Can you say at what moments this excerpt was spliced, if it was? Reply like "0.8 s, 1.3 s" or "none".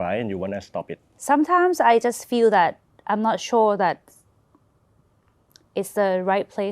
1.0 s